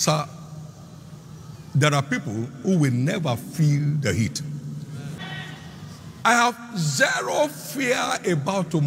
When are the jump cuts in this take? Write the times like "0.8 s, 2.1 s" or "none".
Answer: 5.2 s